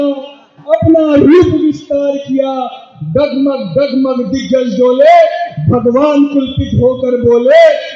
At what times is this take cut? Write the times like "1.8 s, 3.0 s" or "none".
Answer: none